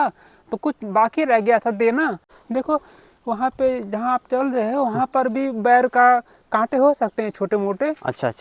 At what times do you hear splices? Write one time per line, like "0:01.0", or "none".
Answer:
0:02.3